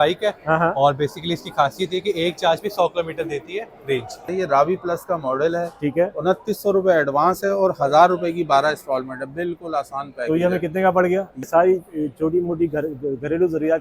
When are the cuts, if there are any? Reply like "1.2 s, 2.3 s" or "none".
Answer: 4.3 s, 11.5 s